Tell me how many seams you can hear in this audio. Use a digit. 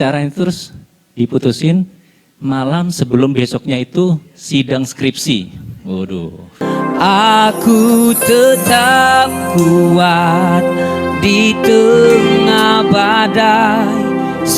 1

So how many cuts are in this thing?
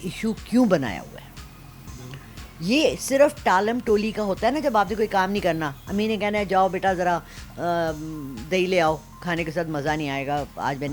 0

